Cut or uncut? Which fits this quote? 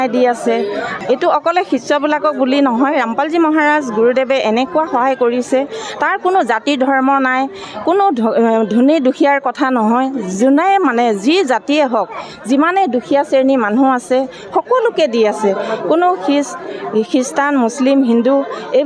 cut